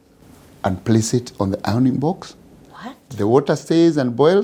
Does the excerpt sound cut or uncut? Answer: uncut